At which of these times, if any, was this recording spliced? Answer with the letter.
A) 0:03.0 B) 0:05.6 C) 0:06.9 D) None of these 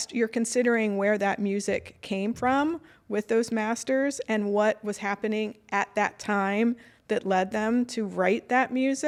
D